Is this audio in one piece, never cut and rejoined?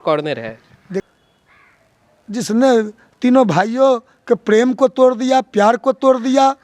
no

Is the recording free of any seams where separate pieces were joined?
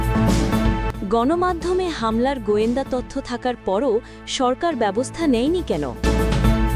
no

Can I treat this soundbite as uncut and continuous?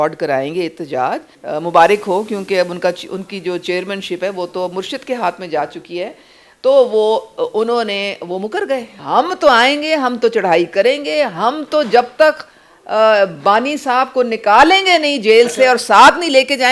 no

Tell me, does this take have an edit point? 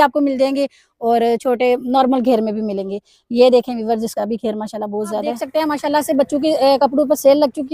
yes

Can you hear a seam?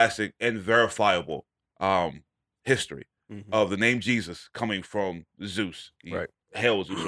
no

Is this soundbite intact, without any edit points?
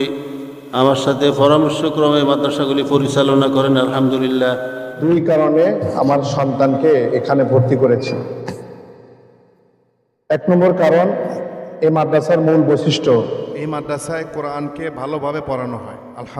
no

